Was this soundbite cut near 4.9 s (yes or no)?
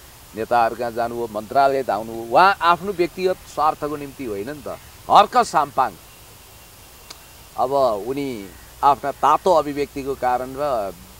yes